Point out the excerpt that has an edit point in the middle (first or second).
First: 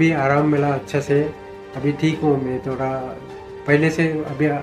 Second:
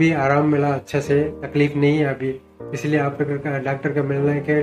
second